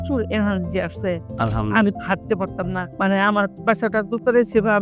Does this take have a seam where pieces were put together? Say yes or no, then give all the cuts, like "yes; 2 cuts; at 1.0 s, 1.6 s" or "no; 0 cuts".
yes; 1 cut; at 2.9 s